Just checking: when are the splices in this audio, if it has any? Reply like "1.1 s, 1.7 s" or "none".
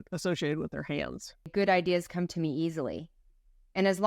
1.5 s